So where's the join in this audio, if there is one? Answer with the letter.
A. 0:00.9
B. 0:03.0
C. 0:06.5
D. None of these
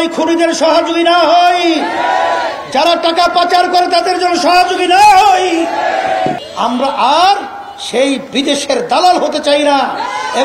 C